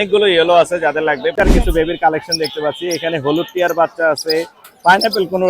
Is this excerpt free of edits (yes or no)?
no